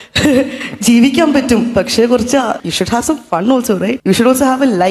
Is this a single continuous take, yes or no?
no